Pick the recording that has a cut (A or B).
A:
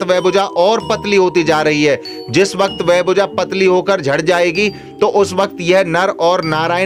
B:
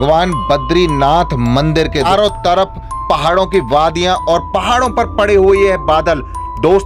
B